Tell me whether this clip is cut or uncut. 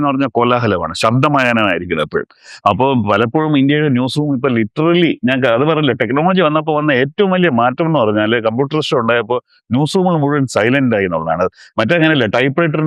uncut